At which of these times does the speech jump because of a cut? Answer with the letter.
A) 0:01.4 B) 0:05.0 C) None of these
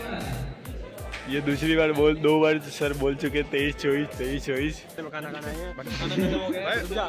B